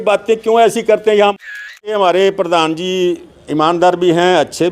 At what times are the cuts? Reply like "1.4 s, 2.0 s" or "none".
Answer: 1.7 s